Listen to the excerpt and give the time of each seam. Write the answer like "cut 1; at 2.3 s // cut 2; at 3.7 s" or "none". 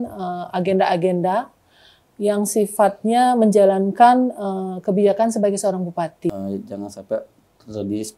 cut 1; at 6.3 s